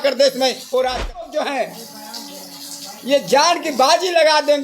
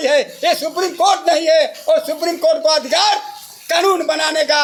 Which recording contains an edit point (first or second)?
first